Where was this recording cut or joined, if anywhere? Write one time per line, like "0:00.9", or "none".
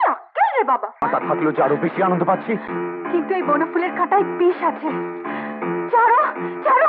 0:01.0